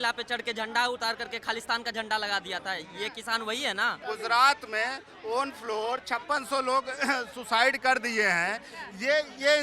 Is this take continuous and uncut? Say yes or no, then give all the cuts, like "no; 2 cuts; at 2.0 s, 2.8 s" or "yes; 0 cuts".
no; 1 cut; at 4.0 s